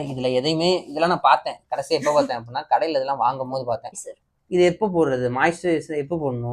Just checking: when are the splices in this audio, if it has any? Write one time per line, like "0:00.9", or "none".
0:04.0